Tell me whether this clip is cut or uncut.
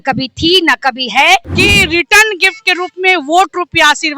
cut